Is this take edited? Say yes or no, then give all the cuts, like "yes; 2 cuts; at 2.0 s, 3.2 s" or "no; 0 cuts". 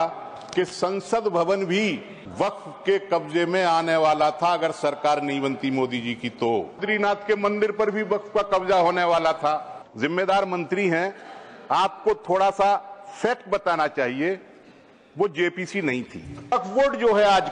yes; 4 cuts; at 2.2 s, 6.8 s, 9.8 s, 16.5 s